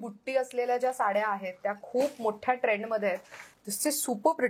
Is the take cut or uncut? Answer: cut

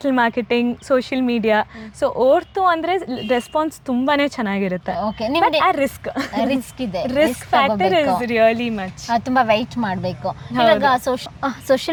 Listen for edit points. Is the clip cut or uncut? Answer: uncut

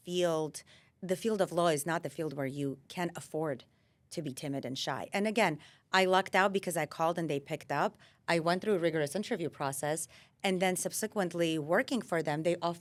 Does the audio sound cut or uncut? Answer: uncut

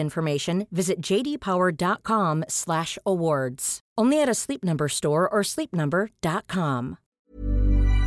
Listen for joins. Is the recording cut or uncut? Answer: cut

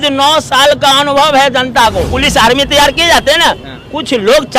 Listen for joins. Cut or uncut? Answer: cut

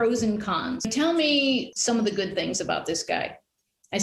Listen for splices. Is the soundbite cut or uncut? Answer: cut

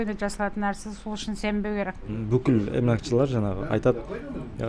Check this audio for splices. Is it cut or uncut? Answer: cut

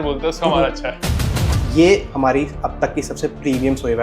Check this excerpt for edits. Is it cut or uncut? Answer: cut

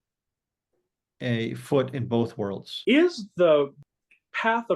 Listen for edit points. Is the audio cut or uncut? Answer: cut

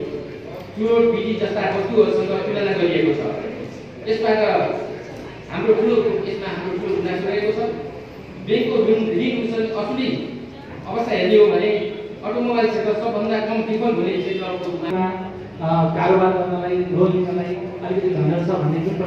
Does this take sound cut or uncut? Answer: cut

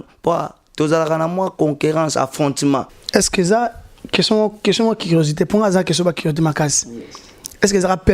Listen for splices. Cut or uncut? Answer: cut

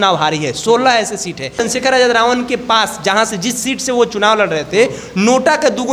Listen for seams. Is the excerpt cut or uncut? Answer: cut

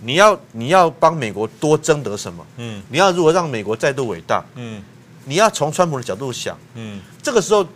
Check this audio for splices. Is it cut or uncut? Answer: uncut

